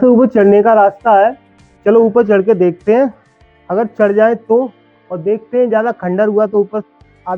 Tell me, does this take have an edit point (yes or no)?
no